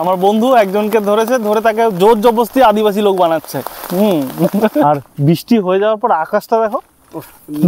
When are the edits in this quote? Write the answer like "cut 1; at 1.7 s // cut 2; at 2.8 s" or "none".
cut 1; at 4.8 s